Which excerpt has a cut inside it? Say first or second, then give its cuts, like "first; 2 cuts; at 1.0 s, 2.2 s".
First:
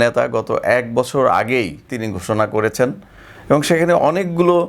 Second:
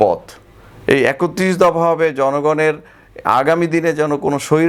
first; 1 cut; at 1.9 s